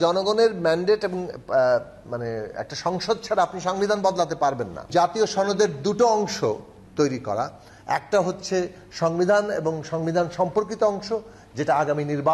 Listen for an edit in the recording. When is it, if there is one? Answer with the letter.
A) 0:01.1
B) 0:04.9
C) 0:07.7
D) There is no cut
B